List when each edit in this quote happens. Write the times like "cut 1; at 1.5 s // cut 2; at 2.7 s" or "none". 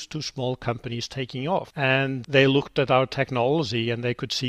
cut 1; at 2.0 s